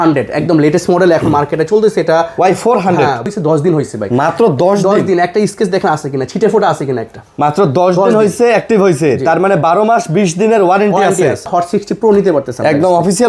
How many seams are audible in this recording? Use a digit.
2